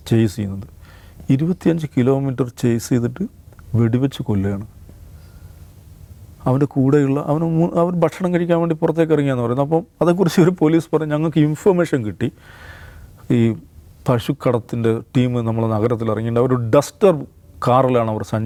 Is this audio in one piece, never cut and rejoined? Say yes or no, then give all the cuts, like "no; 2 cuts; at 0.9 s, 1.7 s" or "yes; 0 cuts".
yes; 0 cuts